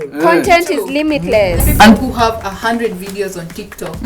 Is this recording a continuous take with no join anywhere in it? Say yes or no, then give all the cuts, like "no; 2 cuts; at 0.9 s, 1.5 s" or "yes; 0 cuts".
no; 1 cut; at 1.7 s